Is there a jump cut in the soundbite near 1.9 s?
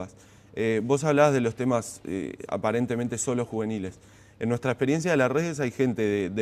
yes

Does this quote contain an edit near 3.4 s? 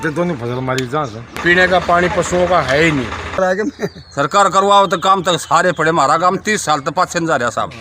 yes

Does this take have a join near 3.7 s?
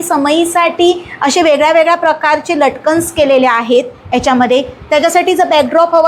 no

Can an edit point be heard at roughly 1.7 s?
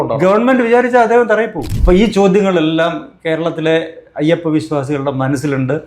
yes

